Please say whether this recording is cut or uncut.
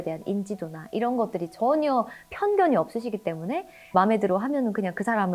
cut